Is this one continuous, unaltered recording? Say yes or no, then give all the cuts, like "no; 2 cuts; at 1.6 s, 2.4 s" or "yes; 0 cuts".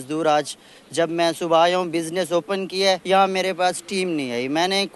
no; 1 cut; at 3.0 s